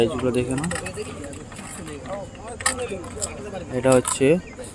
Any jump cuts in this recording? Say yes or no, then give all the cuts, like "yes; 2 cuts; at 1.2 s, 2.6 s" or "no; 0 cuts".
no; 0 cuts